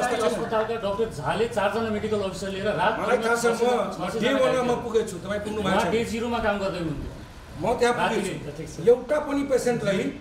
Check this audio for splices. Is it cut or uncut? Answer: uncut